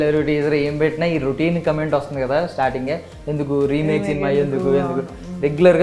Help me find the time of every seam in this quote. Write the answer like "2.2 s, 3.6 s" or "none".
none